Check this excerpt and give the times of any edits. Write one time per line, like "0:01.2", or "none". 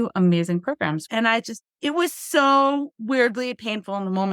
0:01.1